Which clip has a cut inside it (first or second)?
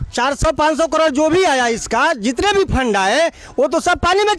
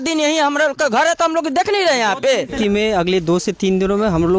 second